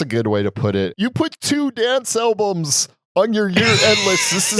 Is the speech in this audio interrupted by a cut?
yes; 1 cut; at 0.9 s

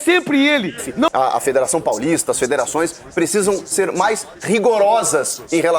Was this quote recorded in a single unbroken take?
no; 1 cut; at 1.1 s

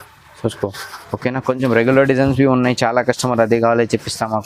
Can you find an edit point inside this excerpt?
no; 0 cuts

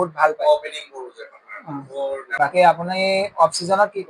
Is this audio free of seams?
no; 1 cut; at 2.4 s

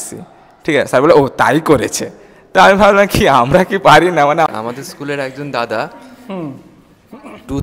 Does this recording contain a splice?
yes; 1 cut; at 4.5 s

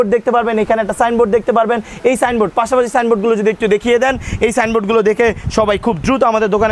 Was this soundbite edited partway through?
no; 0 cuts

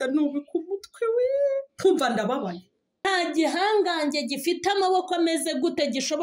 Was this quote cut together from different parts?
yes; 1 cut; at 3.0 s

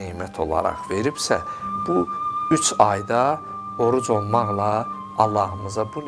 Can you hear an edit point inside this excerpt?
no; 0 cuts

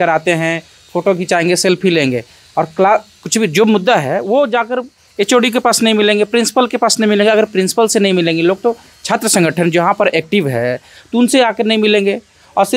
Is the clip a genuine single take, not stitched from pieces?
yes; 0 cuts

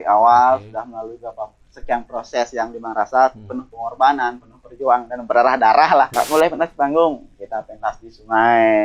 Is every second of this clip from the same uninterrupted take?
no; 1 cut; at 6.1 s

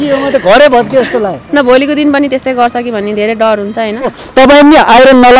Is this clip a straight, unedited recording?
no; 1 cut; at 4.2 s

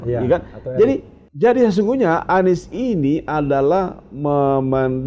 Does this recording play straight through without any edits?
no; 1 cut; at 1.2 s

